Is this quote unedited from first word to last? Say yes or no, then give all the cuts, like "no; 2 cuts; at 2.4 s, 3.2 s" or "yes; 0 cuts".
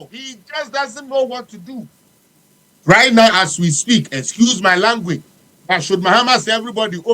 no; 1 cut; at 1.9 s